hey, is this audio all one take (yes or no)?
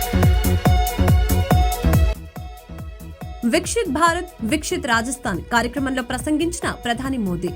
yes